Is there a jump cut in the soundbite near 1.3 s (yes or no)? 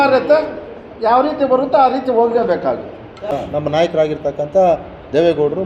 no